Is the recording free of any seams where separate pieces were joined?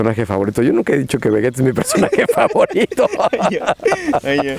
yes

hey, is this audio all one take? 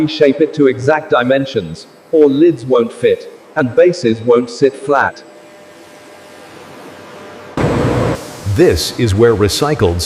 yes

